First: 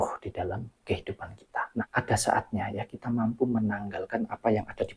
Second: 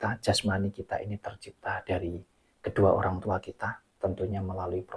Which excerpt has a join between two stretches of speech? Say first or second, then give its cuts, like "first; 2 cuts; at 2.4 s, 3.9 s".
first; 1 cut; at 1.9 s